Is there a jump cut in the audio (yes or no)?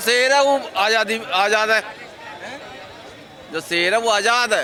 no